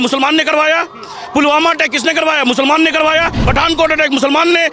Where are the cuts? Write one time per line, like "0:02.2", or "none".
0:03.4